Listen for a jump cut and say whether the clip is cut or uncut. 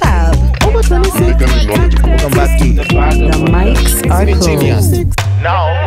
uncut